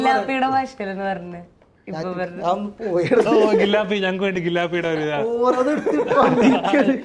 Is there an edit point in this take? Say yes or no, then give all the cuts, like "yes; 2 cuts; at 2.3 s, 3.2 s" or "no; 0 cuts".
no; 0 cuts